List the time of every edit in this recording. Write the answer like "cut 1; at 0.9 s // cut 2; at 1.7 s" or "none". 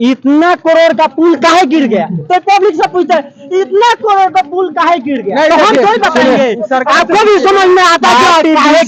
none